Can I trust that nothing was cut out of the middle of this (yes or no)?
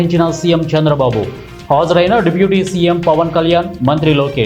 yes